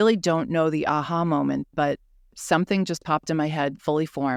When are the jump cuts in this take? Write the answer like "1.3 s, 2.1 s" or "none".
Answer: none